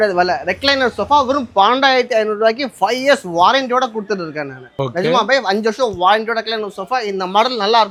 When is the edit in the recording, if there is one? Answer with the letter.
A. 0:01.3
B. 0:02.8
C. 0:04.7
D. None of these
D